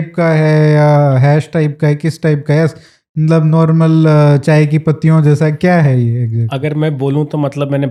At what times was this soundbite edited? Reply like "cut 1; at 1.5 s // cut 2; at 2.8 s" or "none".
none